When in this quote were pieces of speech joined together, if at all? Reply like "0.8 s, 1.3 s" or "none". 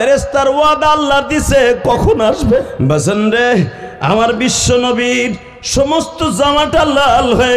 2.7 s